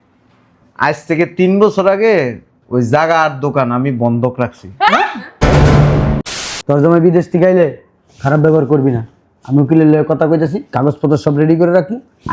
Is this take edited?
yes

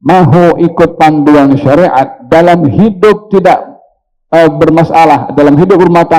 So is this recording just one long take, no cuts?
yes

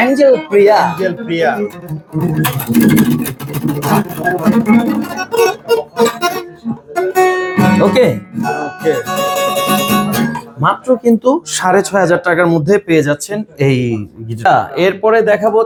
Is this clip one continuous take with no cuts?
yes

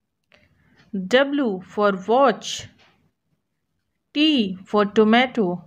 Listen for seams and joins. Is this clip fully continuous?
yes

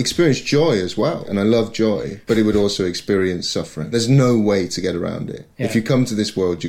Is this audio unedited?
no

